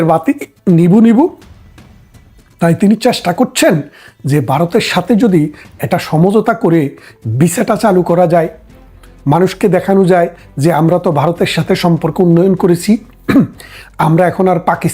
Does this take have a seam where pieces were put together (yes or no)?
no